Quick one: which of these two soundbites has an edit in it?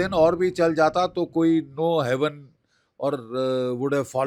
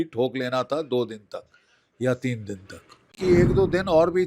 second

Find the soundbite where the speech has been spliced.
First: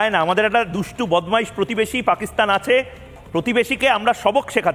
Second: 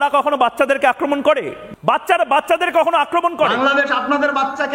second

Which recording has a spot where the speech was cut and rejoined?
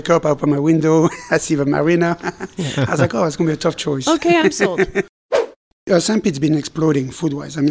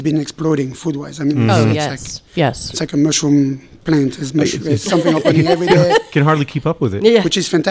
first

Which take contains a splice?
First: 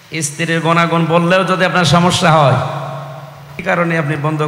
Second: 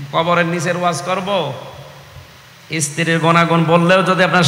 first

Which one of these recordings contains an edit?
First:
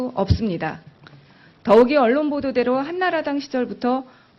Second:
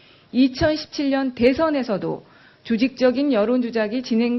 first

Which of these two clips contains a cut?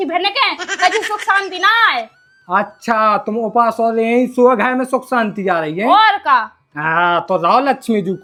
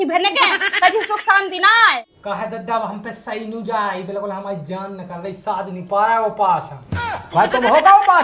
second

